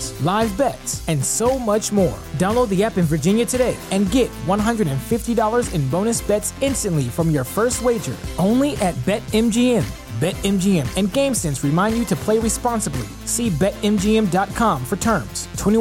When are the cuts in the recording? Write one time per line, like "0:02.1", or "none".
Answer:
none